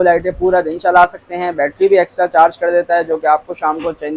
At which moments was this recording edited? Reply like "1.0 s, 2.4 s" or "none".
none